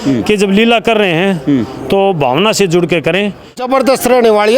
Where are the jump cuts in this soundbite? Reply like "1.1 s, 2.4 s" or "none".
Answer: 3.6 s